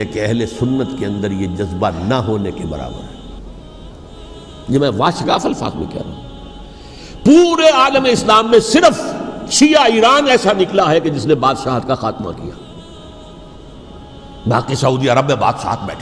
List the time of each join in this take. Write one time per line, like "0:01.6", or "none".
none